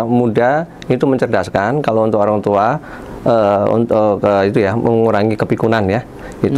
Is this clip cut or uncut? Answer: uncut